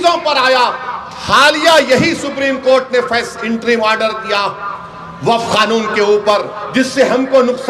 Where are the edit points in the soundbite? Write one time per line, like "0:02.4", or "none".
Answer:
none